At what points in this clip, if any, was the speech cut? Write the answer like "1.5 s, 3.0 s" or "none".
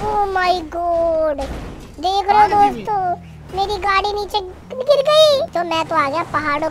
5.5 s